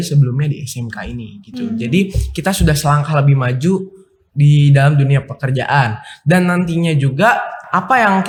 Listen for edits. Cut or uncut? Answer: uncut